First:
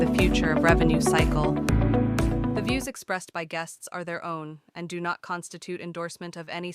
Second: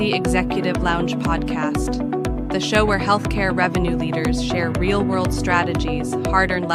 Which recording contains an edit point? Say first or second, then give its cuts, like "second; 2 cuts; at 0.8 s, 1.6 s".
first; 1 cut; at 2.6 s